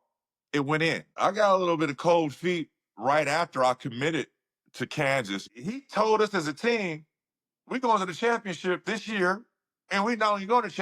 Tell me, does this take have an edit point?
yes; 2 cuts; at 1.2 s, 5.5 s

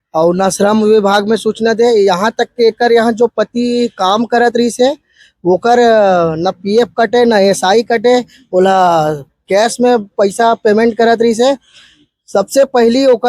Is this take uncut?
yes; 0 cuts

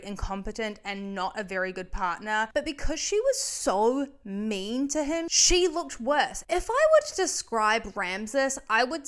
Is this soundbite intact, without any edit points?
no; 3 cuts; at 2.5 s, 5.3 s, 6.4 s

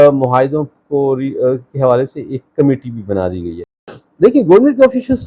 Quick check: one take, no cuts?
no; 1 cut; at 3.9 s

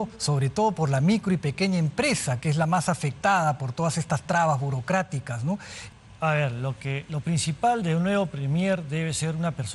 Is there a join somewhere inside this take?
yes; 1 cut; at 5.7 s

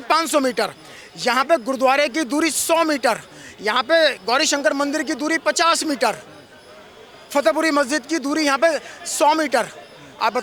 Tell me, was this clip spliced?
no; 0 cuts

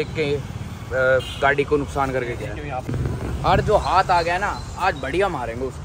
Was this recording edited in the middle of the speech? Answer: yes; 1 cut; at 2.9 s

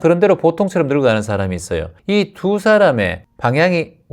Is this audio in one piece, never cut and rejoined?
no; 2 cuts; at 1.9 s, 3.2 s

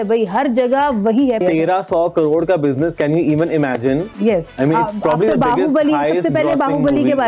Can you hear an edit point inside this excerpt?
yes; 1 cut; at 1.4 s

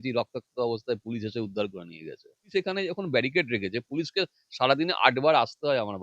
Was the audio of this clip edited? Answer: yes; 1 cut; at 2.5 s

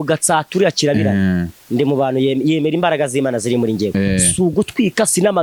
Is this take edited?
no; 0 cuts

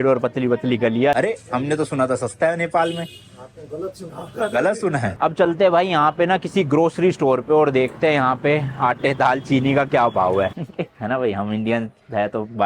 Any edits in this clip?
yes; 3 cuts; at 1.1 s, 5.2 s, 10.5 s

